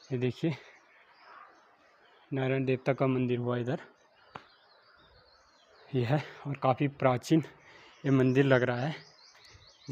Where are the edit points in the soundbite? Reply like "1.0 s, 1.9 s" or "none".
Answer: none